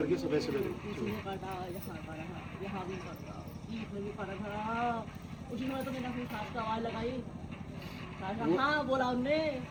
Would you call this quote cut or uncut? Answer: uncut